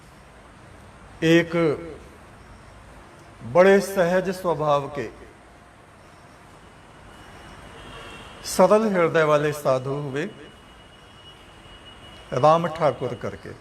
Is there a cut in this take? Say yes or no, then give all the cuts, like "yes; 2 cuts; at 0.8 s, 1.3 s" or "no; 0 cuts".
no; 0 cuts